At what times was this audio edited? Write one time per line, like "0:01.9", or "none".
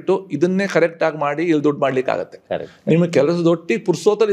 none